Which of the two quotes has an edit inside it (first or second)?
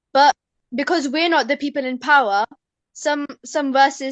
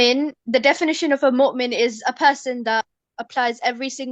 second